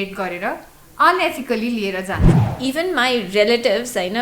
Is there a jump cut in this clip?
yes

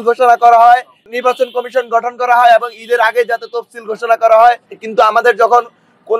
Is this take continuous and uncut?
no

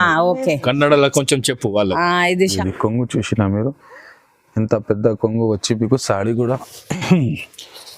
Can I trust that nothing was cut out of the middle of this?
no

